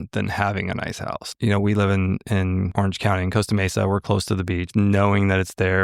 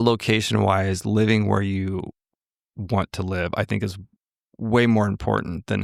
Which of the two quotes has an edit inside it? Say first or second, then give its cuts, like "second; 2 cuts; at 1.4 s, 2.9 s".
first; 3 cuts; at 1.3 s, 2.7 s, 4.7 s